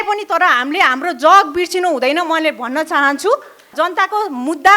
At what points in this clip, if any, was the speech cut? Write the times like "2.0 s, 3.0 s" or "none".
3.7 s